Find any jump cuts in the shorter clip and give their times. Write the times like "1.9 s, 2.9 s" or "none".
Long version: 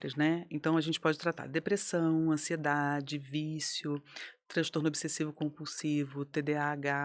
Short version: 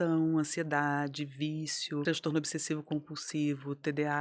2.0 s